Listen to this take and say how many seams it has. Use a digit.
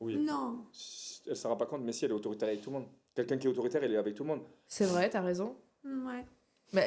0